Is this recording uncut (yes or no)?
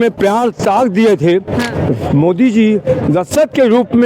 no